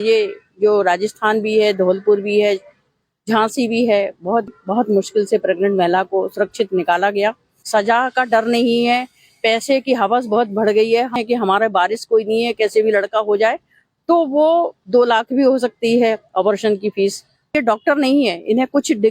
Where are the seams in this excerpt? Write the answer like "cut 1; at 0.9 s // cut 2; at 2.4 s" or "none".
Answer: cut 1; at 4.5 s // cut 2; at 7.5 s // cut 3; at 11.2 s // cut 4; at 17.5 s

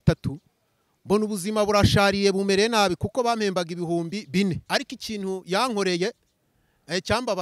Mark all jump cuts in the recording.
cut 1; at 4.6 s

